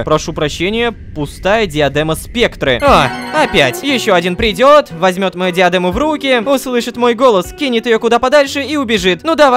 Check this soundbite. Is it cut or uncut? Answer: uncut